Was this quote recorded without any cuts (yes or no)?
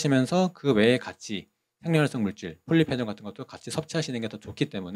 yes